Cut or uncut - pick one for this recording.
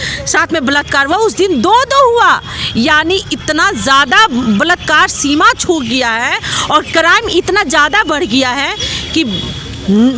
uncut